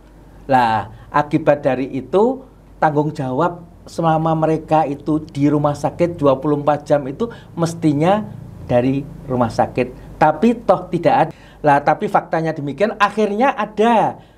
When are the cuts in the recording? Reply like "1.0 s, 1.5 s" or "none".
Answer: 11.3 s